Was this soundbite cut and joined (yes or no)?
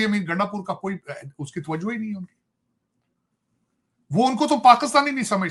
no